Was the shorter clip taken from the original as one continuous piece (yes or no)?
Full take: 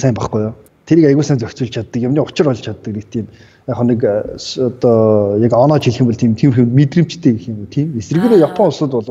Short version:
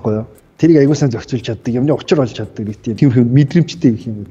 no